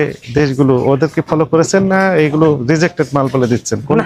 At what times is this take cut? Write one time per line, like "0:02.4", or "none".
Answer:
none